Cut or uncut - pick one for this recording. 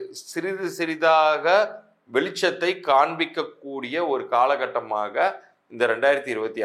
uncut